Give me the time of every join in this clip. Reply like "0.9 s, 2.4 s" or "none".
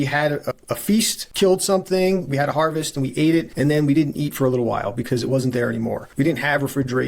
1.2 s, 3.5 s, 6.0 s